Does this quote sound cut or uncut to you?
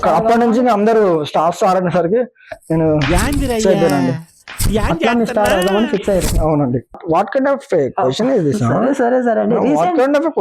cut